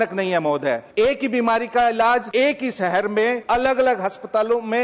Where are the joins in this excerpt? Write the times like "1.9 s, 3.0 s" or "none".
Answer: 0.8 s, 2.3 s, 3.4 s

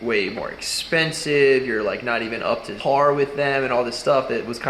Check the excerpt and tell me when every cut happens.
2.7 s

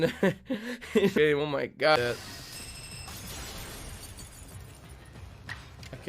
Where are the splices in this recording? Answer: 1.1 s

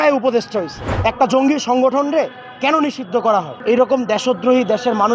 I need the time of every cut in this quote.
0.9 s, 3.5 s

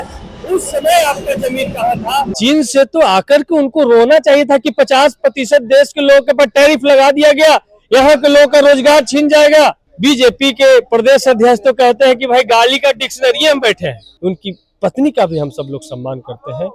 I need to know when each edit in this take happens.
2.3 s, 9.9 s, 14.1 s

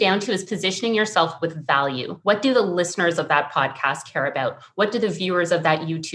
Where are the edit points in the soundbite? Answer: 2.1 s

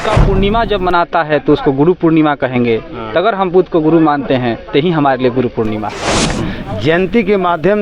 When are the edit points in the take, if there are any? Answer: 6.4 s

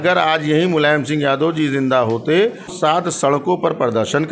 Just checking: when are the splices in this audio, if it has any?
2.7 s

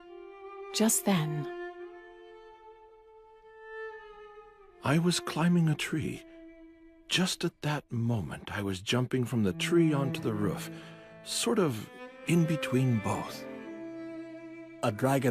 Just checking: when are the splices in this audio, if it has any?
none

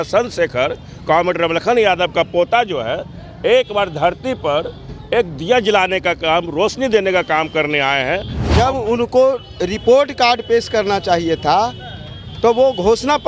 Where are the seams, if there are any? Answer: 8.4 s

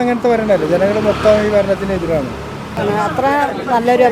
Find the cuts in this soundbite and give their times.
2.7 s

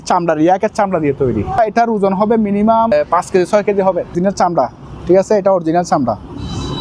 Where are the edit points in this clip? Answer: 1.6 s, 2.9 s, 4.1 s

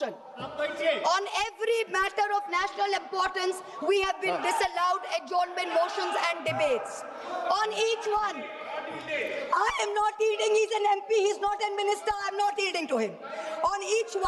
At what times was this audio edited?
none

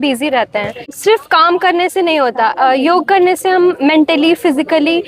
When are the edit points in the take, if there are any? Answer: 0.9 s

